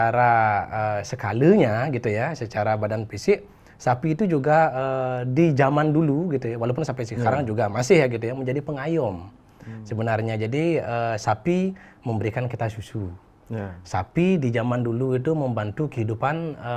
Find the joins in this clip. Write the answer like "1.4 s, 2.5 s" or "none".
none